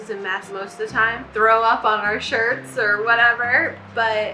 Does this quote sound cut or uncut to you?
uncut